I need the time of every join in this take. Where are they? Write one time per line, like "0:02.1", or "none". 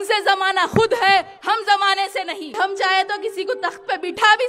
0:02.5